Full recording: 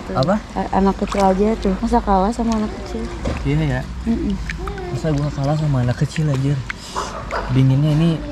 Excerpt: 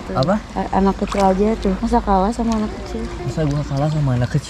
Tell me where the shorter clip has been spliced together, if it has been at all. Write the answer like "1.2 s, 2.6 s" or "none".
3.2 s